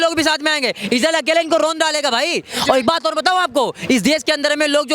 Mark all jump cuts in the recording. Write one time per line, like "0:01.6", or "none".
none